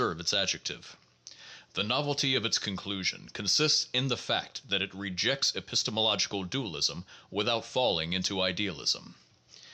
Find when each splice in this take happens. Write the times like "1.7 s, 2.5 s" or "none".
none